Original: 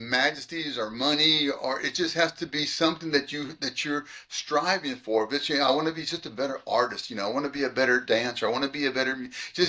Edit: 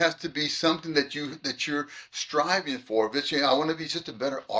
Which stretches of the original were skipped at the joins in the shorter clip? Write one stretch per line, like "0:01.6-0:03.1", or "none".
none

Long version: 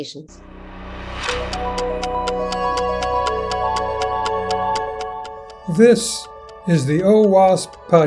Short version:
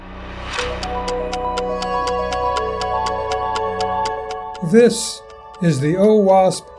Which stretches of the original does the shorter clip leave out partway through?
0:05.2-0:05.6

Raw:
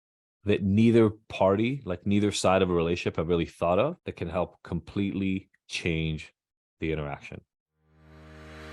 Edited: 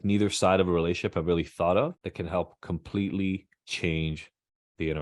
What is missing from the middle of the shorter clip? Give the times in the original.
none

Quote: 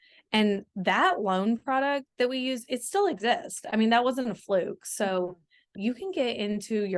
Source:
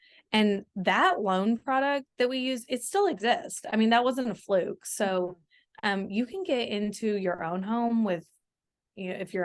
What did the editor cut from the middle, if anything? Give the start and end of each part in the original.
0:05.7-0:06.1

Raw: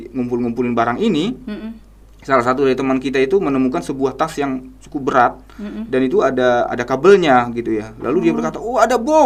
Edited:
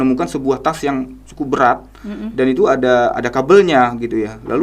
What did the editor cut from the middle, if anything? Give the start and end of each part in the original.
none

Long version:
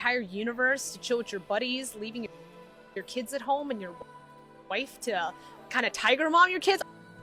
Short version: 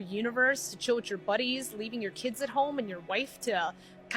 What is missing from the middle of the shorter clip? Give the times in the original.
0:02.3-0:03.0
0:03.9-0:04.6

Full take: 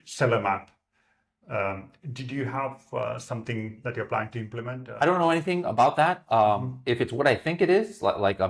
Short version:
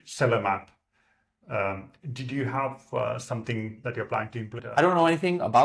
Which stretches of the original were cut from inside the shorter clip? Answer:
0:04.6-0:04.8

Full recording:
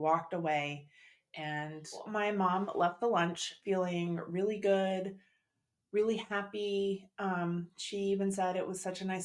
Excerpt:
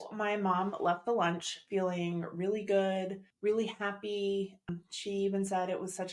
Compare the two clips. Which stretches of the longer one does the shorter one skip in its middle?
0:05.2-0:05.7
0:07.2-0:07.5

